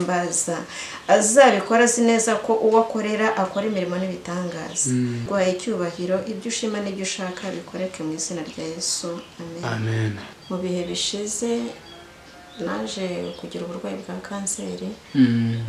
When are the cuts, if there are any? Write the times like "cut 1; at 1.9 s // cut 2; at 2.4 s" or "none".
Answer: cut 1; at 5.3 s // cut 2; at 10.2 s